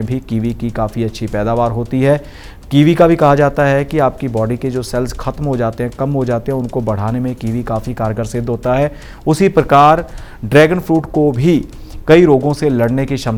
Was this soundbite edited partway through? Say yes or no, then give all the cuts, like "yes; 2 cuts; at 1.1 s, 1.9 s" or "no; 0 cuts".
no; 0 cuts